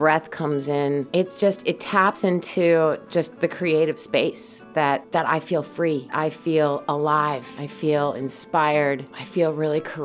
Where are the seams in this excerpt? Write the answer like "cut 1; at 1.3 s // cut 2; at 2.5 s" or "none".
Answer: cut 1; at 1.1 s // cut 2; at 5.0 s // cut 3; at 6.1 s // cut 4; at 7.6 s // cut 5; at 9.2 s